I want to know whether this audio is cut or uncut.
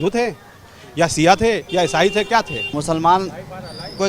cut